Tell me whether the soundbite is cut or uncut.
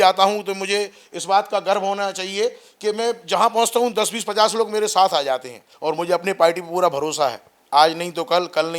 cut